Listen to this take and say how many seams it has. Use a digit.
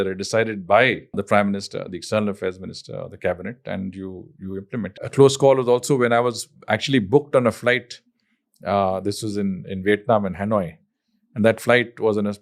2